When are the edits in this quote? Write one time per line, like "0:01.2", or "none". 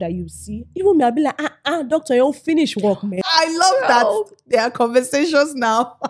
0:03.2

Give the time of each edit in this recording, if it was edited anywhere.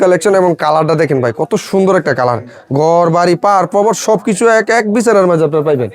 none

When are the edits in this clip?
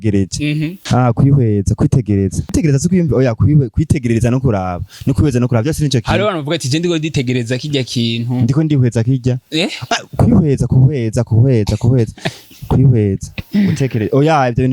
0:00.8
0:02.5

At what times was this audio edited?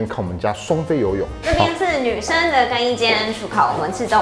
none

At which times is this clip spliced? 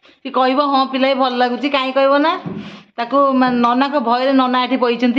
none

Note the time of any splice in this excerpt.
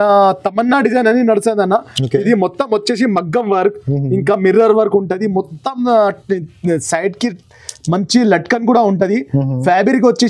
none

